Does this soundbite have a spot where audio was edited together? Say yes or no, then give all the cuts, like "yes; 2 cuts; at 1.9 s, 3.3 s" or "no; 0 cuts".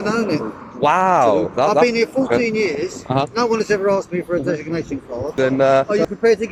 yes; 2 cuts; at 1.8 s, 5.3 s